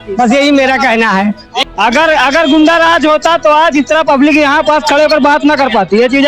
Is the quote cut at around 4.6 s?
no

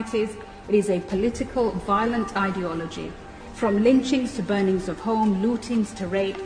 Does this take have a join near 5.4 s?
no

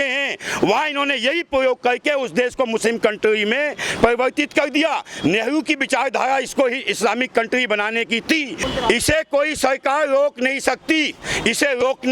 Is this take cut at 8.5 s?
yes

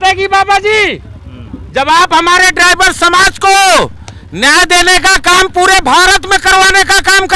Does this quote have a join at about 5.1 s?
no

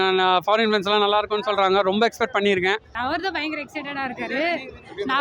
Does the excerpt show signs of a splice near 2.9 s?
yes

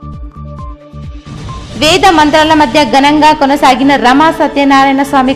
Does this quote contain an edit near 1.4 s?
yes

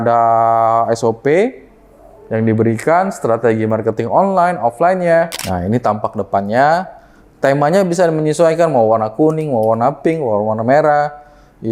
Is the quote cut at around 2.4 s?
no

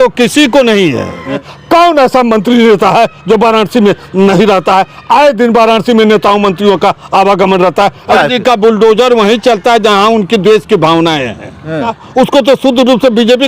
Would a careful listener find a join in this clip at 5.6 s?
no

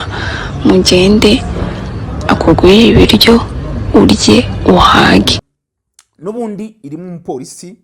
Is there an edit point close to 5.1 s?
yes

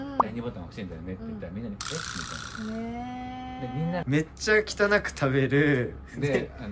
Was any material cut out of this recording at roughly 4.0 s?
yes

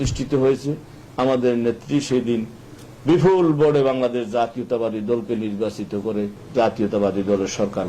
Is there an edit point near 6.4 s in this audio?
yes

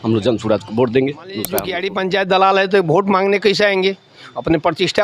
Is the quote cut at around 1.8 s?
yes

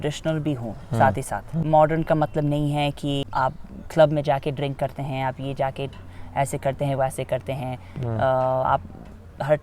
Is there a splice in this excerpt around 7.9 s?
no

